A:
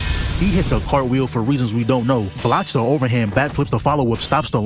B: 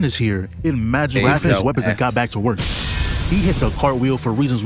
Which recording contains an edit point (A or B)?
B